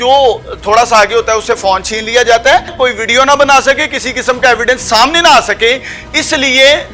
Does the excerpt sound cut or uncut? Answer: cut